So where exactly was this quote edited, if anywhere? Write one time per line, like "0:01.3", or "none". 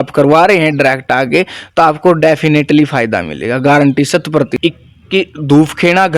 0:04.5

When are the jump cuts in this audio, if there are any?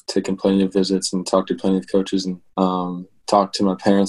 0:02.4

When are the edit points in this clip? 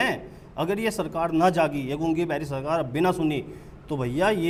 none

